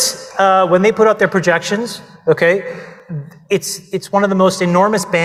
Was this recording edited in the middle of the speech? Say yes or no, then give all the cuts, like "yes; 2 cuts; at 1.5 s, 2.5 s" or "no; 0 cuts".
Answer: no; 0 cuts